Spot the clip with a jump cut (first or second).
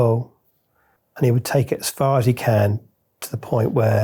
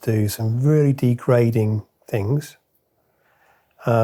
first